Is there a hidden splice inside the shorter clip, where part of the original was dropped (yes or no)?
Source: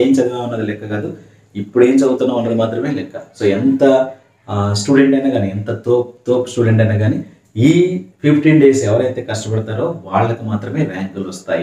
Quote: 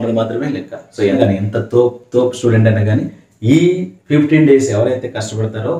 yes